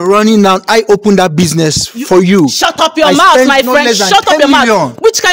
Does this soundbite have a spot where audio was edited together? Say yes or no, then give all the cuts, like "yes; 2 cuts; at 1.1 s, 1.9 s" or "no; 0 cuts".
no; 0 cuts